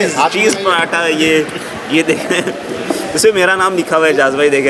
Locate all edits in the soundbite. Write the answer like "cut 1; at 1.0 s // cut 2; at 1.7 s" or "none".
none